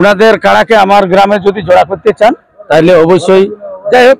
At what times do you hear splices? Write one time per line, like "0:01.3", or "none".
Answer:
none